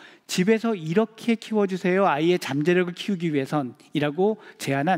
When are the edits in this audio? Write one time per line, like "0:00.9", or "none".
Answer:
none